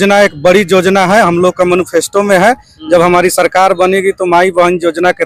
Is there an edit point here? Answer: no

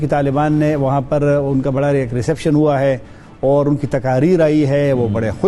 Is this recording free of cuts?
yes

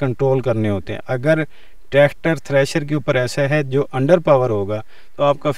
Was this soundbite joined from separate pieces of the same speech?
no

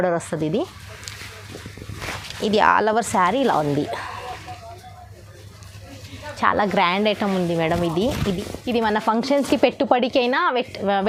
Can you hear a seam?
no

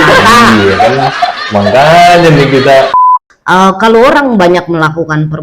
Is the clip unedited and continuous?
no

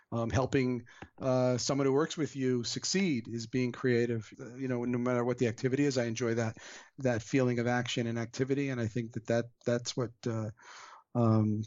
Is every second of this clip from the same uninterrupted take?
no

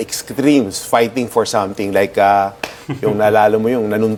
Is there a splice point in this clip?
no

